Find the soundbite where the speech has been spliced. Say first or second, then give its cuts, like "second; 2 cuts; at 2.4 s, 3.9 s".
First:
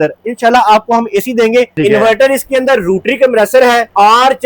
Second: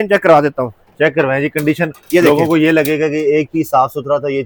first; 1 cut; at 1.7 s